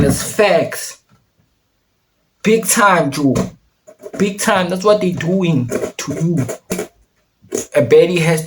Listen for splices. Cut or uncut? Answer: cut